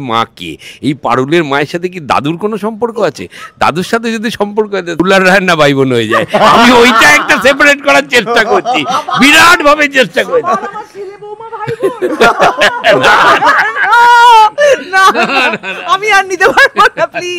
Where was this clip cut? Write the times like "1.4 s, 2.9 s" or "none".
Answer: 5.0 s